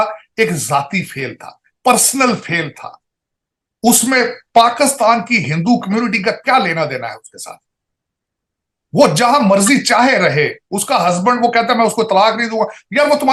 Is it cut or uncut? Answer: uncut